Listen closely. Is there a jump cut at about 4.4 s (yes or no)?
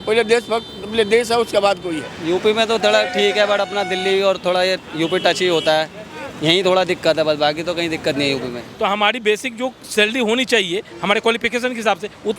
no